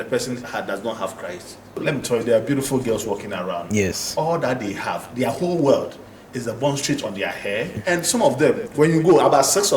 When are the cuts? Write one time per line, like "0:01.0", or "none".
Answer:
0:01.8
0:07.7